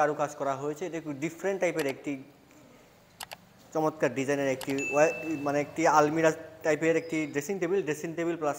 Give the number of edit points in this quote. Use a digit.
0